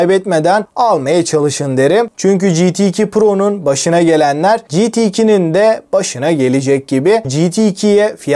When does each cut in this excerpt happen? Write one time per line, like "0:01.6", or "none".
0:07.2